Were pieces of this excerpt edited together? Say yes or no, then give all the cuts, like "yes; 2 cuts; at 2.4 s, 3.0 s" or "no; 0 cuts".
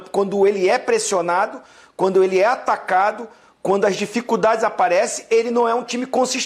no; 0 cuts